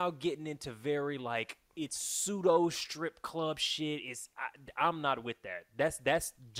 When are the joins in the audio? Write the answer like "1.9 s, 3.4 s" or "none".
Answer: none